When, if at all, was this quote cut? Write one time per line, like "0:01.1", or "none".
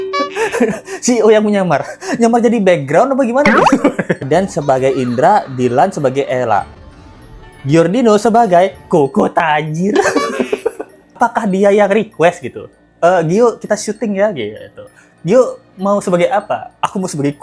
0:04.2
0:11.2